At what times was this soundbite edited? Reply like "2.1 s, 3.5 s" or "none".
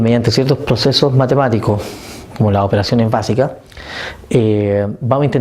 1.0 s